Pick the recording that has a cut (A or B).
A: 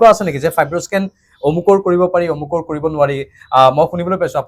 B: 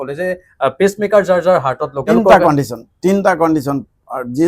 B